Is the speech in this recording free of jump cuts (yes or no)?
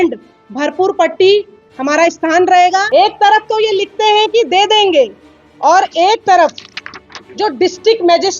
no